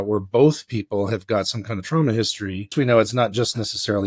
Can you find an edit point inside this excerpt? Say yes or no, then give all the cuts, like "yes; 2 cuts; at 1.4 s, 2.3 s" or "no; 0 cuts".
yes; 1 cut; at 2.7 s